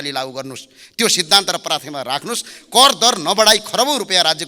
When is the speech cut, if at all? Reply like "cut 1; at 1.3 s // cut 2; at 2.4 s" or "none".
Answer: none

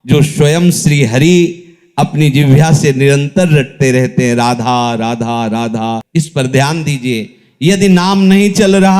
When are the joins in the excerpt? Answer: cut 1; at 6.0 s

